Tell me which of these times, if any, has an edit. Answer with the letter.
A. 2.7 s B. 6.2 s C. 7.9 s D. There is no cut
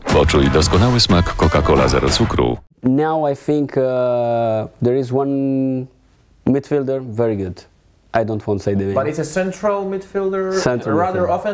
A